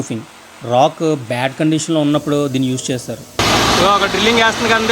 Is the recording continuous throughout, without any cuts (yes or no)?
no